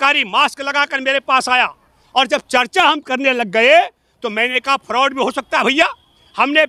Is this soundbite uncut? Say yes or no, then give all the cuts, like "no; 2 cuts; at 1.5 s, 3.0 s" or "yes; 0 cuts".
yes; 0 cuts